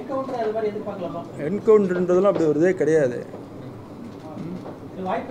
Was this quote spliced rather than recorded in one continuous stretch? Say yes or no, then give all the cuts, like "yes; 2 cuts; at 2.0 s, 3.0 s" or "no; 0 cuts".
no; 0 cuts